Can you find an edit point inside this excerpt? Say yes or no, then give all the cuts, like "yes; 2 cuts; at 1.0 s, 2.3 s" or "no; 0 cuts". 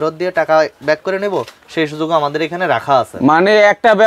no; 0 cuts